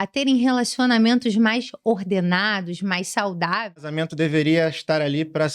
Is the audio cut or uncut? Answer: cut